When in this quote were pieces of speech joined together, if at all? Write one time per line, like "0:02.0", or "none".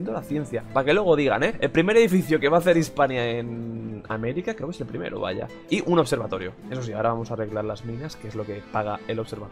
none